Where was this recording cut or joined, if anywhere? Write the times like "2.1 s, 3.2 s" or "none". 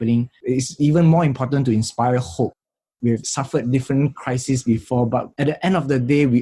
none